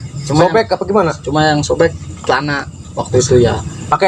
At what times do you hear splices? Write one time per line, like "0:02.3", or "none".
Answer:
none